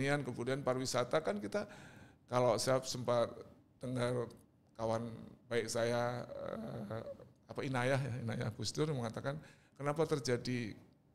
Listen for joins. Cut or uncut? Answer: uncut